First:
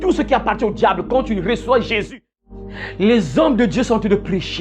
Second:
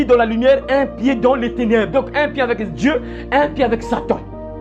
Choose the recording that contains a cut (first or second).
first